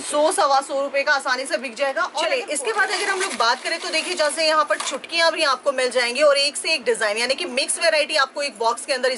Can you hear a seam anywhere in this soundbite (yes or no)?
yes